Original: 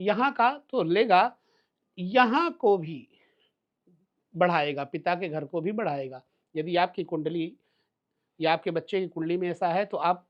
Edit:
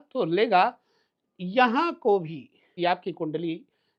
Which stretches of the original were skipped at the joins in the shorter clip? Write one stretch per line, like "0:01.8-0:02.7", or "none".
0:03.3-0:06.7